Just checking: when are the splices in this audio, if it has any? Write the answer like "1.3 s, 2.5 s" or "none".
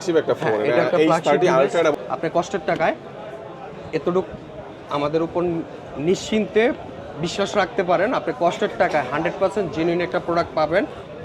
1.9 s